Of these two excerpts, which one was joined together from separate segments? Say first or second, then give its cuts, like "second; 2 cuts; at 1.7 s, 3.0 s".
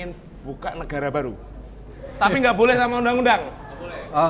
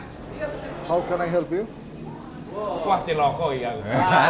first; 1 cut; at 2.0 s